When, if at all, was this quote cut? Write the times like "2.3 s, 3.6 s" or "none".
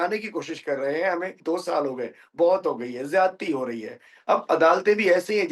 1.4 s, 4.1 s